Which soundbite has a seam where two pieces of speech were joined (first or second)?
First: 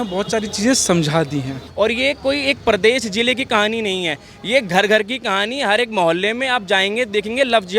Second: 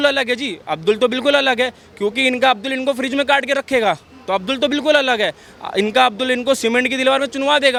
first